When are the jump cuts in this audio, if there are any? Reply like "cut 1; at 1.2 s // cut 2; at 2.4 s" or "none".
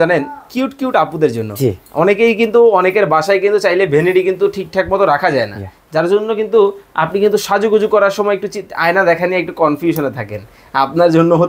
none